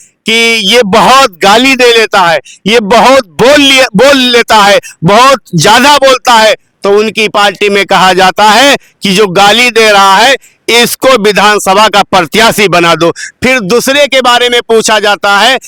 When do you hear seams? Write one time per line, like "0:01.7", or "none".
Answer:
none